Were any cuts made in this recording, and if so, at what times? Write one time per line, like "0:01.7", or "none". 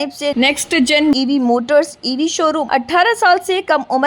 0:02.6